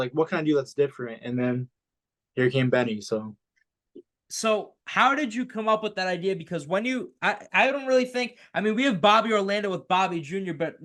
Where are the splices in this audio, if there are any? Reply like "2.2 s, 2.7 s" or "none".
none